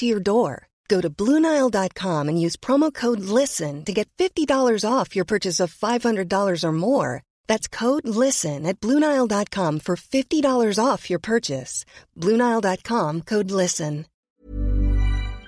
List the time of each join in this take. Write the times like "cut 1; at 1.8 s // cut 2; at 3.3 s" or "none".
cut 1; at 14.1 s